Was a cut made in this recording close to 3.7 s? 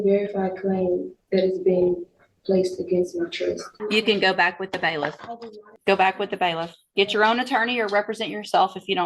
yes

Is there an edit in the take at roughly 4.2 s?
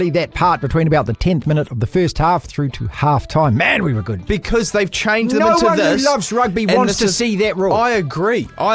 yes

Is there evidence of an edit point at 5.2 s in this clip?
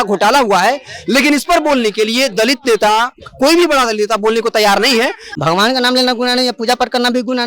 yes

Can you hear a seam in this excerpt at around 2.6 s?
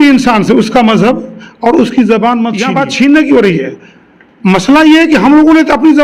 yes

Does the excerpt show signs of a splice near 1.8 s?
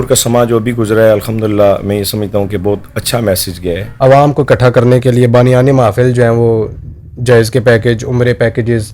no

